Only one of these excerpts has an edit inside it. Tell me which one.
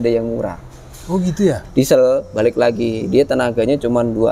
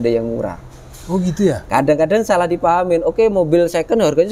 first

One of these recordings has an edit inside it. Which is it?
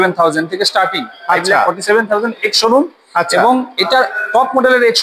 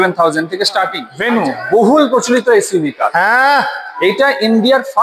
second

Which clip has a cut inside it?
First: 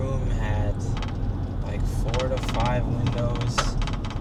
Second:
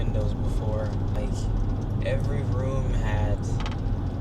second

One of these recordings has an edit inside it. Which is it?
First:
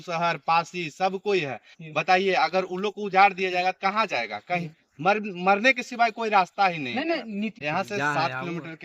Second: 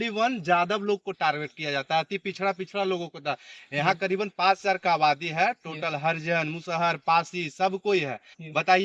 first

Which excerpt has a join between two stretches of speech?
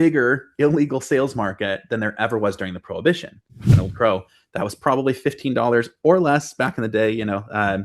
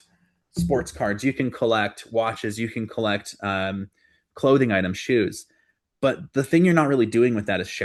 first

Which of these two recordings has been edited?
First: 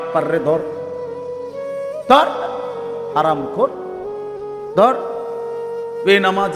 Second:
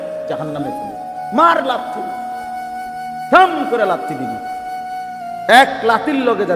second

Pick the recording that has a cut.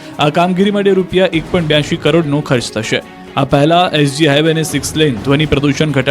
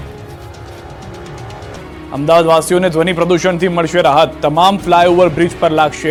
first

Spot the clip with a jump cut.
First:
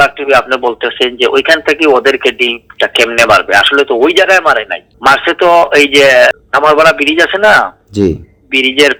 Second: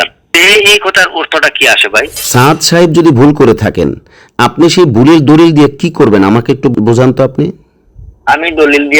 second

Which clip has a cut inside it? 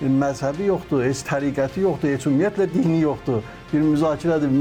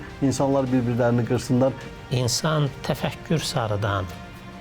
second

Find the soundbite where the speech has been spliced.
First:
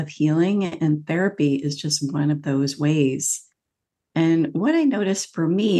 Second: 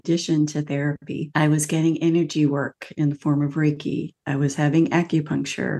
second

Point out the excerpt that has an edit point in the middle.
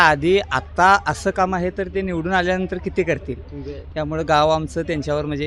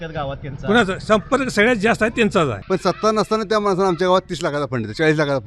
second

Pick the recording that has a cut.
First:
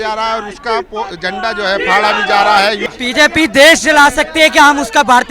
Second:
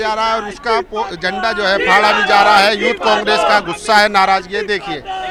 first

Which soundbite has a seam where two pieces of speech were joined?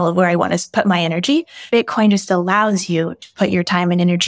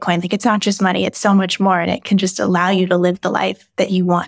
first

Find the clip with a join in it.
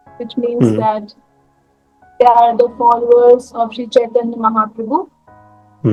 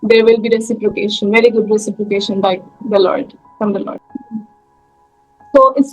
second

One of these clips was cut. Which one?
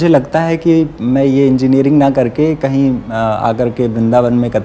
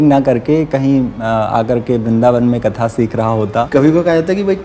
second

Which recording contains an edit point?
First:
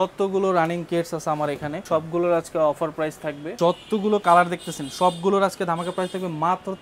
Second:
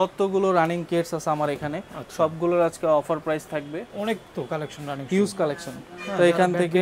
first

